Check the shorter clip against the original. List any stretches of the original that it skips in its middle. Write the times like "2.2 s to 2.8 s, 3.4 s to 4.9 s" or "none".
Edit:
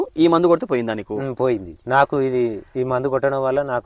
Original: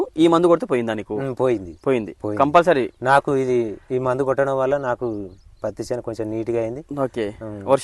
1.8 s to 2.9 s